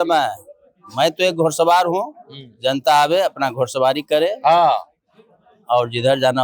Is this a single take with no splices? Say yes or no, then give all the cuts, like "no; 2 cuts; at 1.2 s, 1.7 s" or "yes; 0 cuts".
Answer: yes; 0 cuts